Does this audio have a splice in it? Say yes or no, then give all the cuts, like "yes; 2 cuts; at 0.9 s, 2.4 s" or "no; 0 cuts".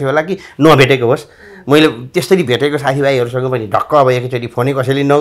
no; 0 cuts